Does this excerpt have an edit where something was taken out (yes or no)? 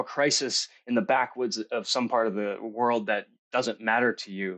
no